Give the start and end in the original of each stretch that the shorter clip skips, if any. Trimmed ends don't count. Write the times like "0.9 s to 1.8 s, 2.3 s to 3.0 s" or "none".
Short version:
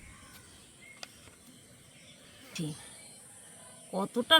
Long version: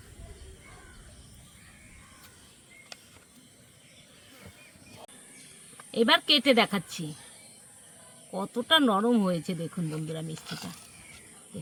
4.4 s to 6.9 s